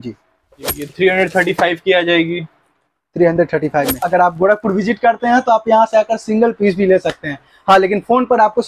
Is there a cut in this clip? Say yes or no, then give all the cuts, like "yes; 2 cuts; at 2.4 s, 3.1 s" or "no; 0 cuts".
yes; 2 cuts; at 0.8 s, 4.0 s